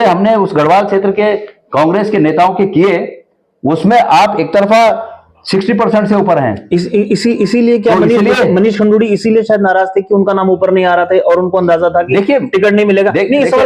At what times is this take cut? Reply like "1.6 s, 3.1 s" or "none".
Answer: none